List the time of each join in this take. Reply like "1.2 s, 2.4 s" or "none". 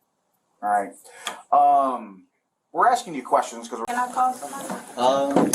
3.9 s